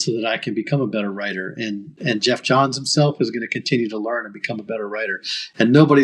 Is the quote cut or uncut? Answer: uncut